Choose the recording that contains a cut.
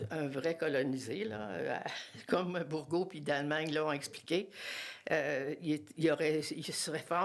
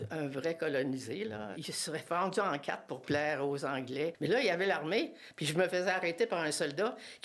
second; 2 cuts; at 1.5 s, 4.2 s

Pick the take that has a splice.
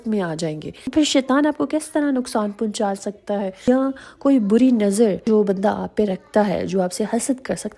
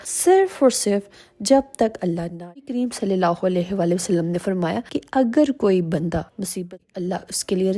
second; 2 cuts; at 2.7 s, 6.7 s

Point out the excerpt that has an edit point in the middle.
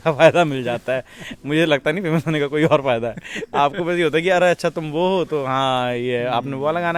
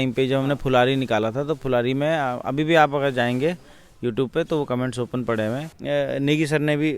second; 1 cut; at 5.7 s

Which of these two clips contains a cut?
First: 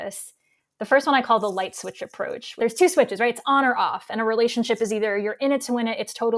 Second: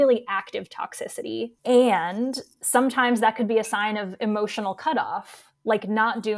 first; 1 cut; at 2.5 s

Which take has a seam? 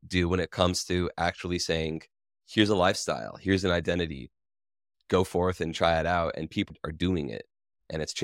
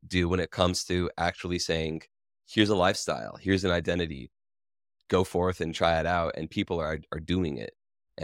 first; 1 cut; at 6.7 s

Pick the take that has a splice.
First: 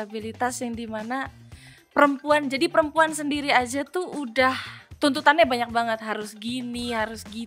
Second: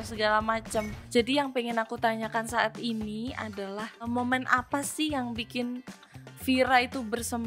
second; 2 cuts; at 1.0 s, 4.1 s

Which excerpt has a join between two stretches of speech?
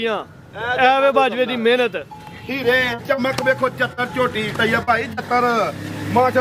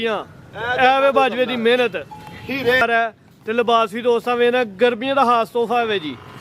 second; 1 cut; at 2.8 s

